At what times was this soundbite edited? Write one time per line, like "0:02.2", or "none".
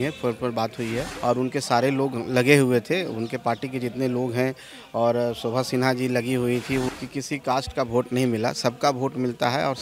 0:01.1
0:06.9